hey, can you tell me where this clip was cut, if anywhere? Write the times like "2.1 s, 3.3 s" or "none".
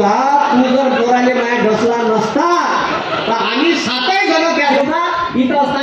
4.7 s